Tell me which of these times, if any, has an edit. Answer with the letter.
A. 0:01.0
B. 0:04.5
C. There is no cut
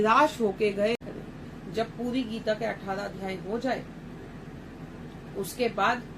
A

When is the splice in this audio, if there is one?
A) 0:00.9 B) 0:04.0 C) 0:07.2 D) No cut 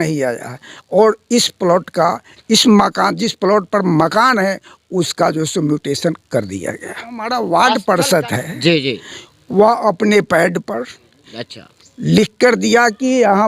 C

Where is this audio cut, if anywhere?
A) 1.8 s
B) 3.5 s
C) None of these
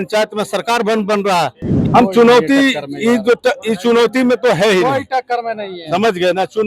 A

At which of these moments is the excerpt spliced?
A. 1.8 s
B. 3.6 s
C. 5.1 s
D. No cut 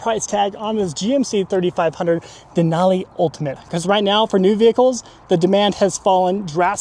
B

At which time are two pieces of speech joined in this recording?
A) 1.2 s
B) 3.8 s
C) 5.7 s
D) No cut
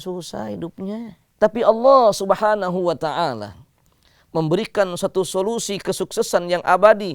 A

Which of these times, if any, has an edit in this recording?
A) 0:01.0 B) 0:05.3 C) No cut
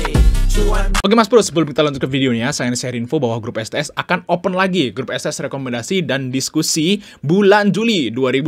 A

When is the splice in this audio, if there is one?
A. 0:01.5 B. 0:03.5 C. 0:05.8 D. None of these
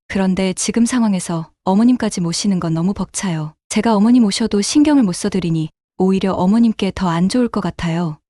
D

